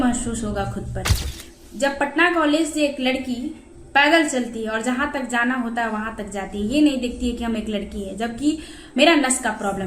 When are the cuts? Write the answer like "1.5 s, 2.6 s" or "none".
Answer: 1.2 s

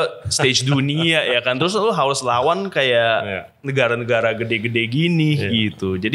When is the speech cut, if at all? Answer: none

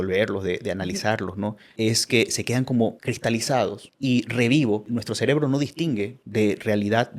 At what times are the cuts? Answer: 1.6 s, 3.4 s, 4.9 s, 6.2 s

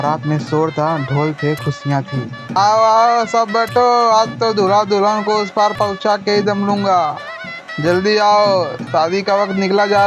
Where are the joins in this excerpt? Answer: 2.6 s

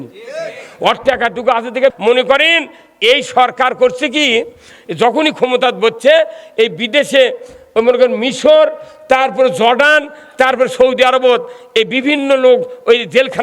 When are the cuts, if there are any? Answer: 2.0 s

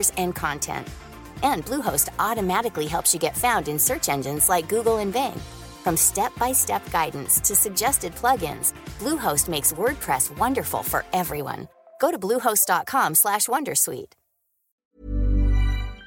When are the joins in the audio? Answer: 14.8 s

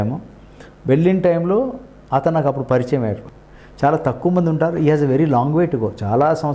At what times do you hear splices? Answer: 3.2 s

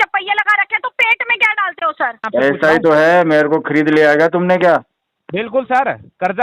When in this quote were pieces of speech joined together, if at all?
2.2 s

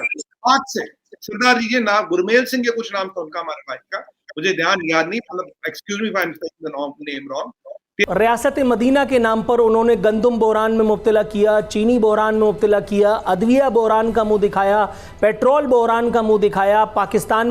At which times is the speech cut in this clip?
8.0 s

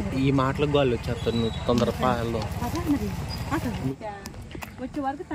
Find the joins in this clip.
3.9 s

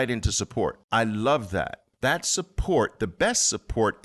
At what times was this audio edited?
0.8 s, 1.8 s

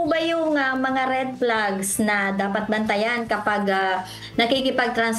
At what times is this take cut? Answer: none

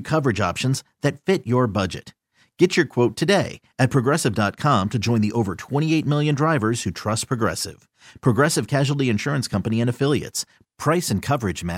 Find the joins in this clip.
none

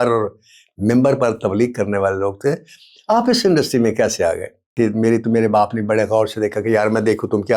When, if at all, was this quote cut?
4.7 s

